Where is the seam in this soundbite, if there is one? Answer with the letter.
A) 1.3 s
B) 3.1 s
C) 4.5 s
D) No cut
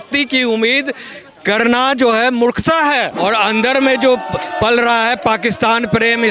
B